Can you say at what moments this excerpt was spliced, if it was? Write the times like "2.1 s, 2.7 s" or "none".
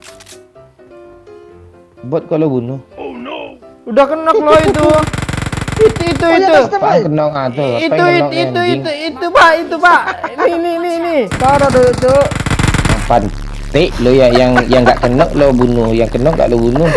11.3 s, 12.4 s